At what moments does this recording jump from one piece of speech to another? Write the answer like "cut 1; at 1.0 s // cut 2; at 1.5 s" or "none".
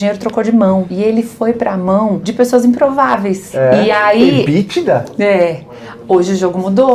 cut 1; at 0.9 s // cut 2; at 2.2 s // cut 3; at 3.4 s